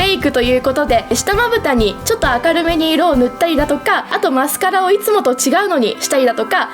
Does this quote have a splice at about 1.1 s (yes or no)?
yes